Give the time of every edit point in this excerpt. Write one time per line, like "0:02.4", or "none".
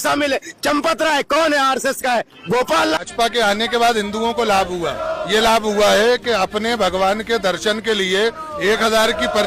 0:03.0